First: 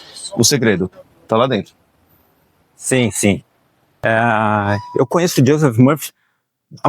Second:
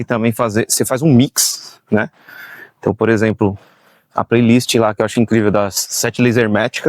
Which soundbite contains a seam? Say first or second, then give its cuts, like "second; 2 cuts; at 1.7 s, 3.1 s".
first; 1 cut; at 4.1 s